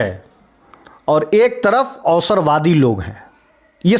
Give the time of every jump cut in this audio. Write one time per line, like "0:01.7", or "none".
none